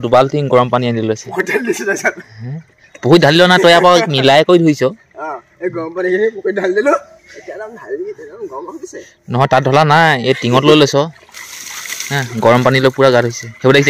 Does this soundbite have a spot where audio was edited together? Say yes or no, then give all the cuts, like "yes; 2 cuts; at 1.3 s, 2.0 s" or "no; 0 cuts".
no; 0 cuts